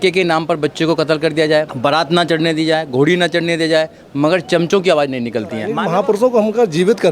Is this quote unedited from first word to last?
no; 2 cuts; at 1.7 s, 5.7 s

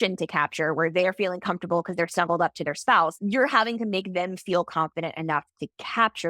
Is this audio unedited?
no; 1 cut; at 3.2 s

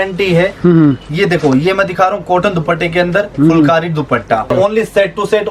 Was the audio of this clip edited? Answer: yes; 1 cut; at 4.5 s

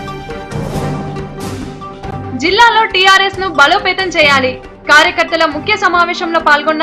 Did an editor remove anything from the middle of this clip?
yes; 1 cut; at 1.3 s

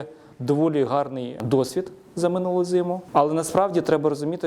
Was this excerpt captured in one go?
no; 2 cuts; at 1.4 s, 3.0 s

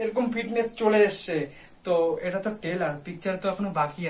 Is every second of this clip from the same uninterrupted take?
yes; 0 cuts

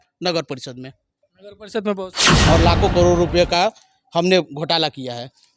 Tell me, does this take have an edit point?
yes; 1 cut; at 2.3 s

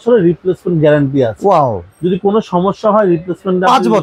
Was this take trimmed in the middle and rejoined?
no; 0 cuts

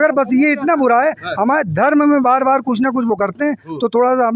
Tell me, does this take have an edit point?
no; 0 cuts

